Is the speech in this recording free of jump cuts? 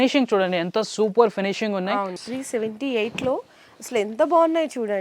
no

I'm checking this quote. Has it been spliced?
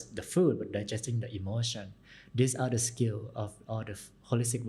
no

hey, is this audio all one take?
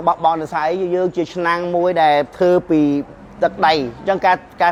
yes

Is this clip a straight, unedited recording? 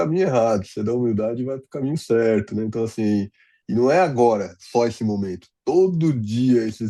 yes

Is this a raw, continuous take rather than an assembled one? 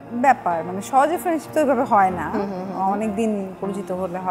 yes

